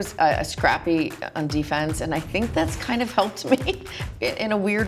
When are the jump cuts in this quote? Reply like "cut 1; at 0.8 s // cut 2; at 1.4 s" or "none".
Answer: none